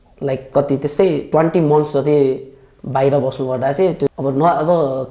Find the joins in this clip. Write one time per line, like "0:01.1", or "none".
0:04.1